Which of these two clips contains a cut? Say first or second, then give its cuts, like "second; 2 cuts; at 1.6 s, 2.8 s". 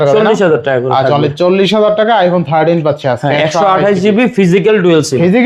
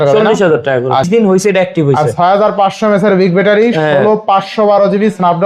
second; 1 cut; at 1.0 s